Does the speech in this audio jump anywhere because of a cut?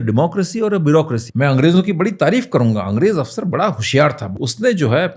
yes; 2 cuts; at 1.2 s, 4.3 s

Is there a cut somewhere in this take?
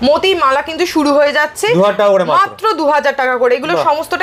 no; 0 cuts

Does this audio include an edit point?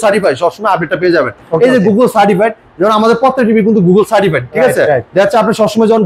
no; 0 cuts

